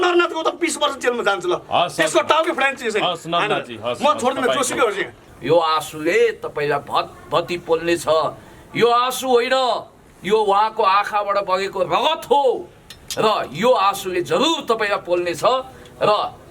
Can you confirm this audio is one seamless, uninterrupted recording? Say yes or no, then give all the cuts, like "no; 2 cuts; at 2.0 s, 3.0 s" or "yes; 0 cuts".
no; 1 cut; at 5.2 s